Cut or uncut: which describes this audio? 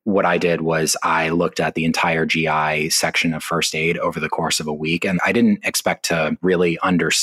cut